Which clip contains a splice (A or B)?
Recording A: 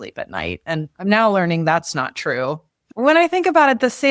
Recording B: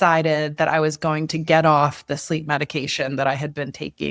A